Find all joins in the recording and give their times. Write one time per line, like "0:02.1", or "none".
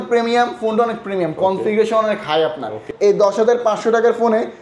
0:02.9